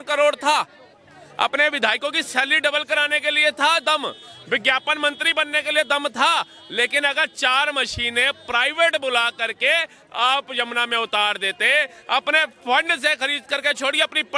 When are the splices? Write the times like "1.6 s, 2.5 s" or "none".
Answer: none